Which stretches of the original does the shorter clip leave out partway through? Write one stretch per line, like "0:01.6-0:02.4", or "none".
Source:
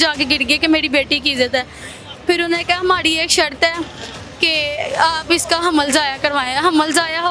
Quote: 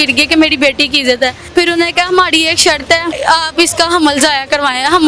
0:01.7-0:02.1
0:03.9-0:04.9

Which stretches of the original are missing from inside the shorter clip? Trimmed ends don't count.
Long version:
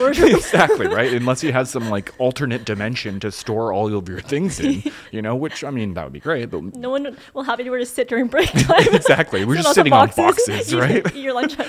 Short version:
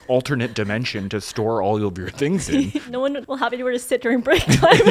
0:05.1-0:07.1

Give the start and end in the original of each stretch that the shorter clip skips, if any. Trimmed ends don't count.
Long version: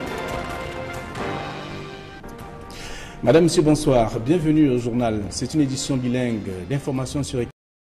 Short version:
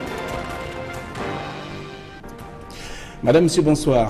none

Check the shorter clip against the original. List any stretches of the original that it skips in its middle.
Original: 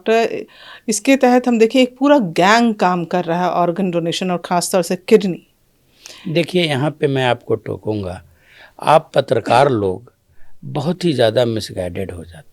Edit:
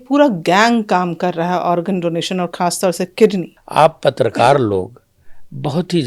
0:05.5-0:08.7

